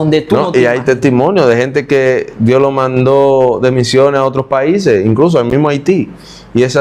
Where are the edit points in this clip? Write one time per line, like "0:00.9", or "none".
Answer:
none